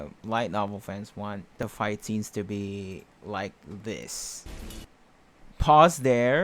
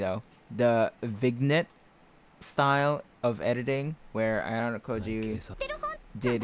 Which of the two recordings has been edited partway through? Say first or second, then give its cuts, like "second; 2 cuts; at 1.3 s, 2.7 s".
first; 2 cuts; at 1.6 s, 4.4 s